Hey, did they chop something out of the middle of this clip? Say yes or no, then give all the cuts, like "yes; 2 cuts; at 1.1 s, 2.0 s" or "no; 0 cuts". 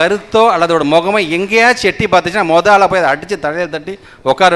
no; 0 cuts